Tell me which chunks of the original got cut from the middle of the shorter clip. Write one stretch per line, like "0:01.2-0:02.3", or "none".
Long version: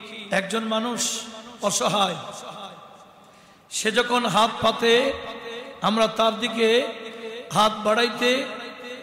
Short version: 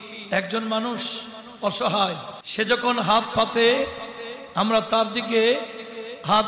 0:02.3-0:03.6

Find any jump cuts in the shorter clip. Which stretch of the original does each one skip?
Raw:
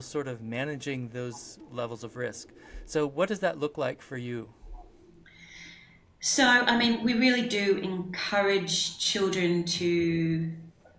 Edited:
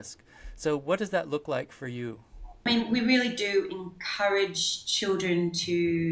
0:05.0-0:06.8

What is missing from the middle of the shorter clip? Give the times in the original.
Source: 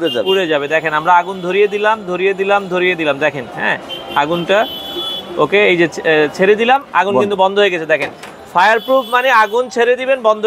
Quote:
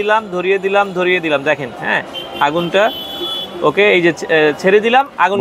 none

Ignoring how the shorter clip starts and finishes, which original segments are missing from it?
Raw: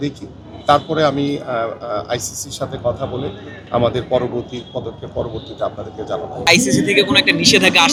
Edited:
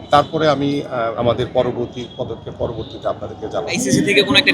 0:01.7-0:03.7
0:06.3-0:06.6

